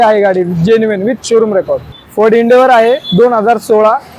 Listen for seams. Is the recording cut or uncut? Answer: cut